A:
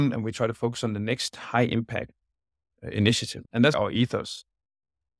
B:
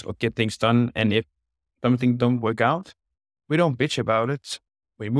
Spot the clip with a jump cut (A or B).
A